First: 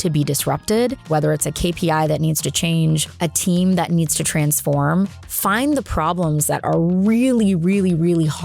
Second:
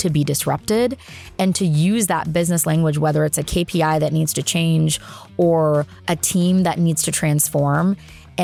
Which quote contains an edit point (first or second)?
first